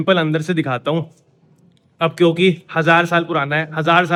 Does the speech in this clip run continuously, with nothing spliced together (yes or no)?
yes